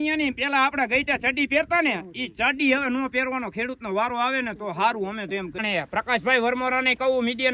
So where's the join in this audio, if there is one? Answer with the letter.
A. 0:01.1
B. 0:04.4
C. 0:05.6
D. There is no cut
C